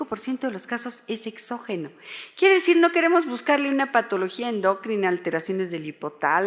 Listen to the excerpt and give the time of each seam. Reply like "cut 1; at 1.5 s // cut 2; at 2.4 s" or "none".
cut 1; at 1.3 s